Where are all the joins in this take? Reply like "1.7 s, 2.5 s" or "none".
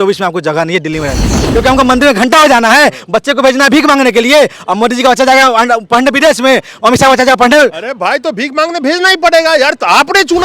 1.5 s